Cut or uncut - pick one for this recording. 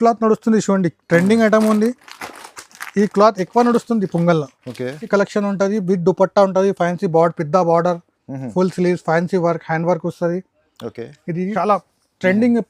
cut